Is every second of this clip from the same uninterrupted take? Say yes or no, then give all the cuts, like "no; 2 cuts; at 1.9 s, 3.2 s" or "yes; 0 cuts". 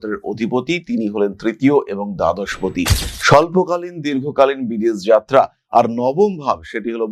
yes; 0 cuts